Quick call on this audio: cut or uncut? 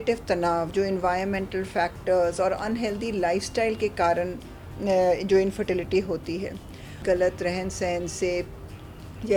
cut